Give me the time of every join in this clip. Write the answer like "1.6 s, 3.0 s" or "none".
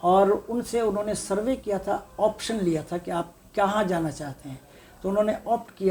none